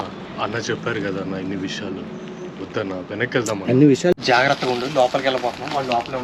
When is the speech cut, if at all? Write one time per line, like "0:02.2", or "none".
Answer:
0:04.2